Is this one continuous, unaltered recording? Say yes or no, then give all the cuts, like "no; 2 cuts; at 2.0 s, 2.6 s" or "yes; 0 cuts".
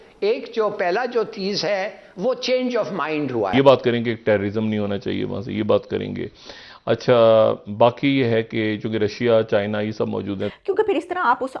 no; 2 cuts; at 3.5 s, 10.5 s